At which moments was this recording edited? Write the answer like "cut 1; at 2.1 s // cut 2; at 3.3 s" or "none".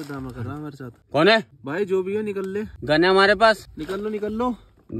cut 1; at 1.0 s // cut 2; at 1.6 s // cut 3; at 2.7 s // cut 4; at 3.7 s